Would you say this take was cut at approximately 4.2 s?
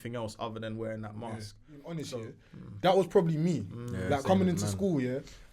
no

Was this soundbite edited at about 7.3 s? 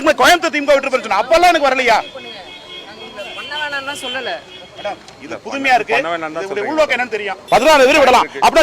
yes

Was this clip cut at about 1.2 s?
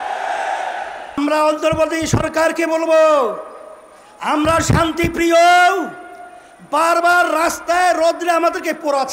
yes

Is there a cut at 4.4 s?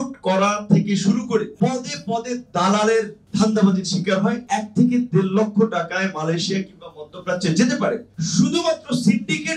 yes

